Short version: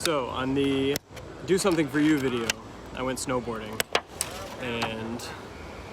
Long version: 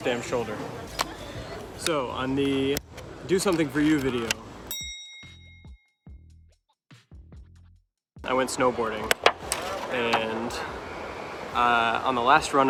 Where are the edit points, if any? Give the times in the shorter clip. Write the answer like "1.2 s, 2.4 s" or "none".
2.8 s

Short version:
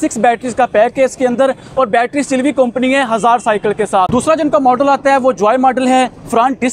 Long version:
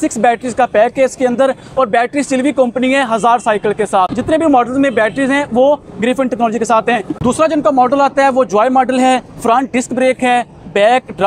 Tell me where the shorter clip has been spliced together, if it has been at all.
4.1 s

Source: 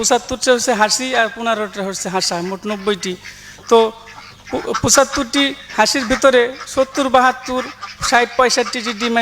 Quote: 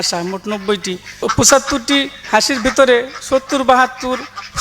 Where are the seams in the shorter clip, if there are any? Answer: 1.2 s

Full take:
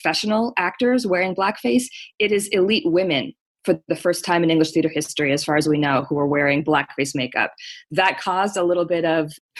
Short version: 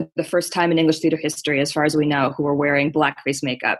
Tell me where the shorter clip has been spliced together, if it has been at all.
none

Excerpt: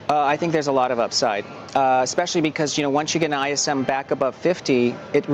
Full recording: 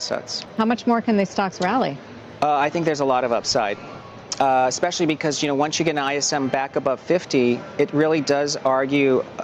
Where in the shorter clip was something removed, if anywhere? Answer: 1.5 s

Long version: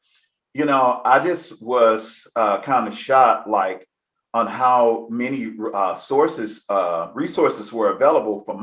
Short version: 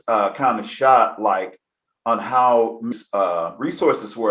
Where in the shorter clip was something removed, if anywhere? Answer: 2.9 s

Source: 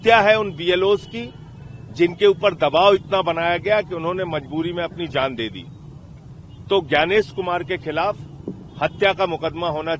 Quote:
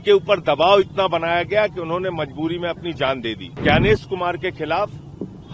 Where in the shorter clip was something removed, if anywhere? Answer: 3.6 s

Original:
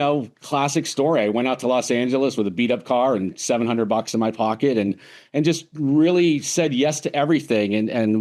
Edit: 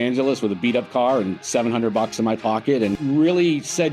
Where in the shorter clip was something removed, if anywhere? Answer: 3.0 s

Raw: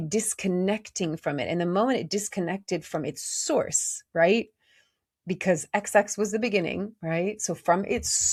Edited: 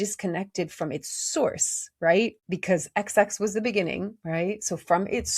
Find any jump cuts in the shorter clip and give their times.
2.5 s

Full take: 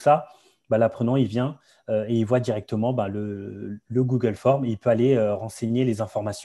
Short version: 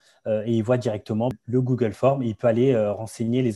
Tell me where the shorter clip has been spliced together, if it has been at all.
1.3 s

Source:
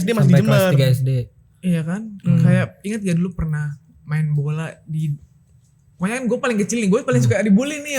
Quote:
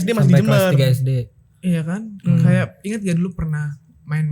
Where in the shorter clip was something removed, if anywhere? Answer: none

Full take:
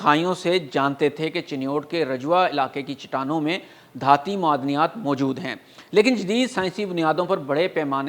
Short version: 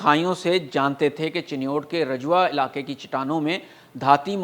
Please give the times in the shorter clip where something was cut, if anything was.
none

